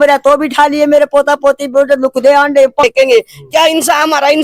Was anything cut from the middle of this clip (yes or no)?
yes